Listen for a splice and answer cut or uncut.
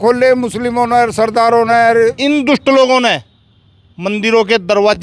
cut